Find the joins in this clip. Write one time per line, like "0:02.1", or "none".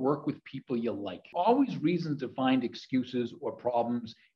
0:01.3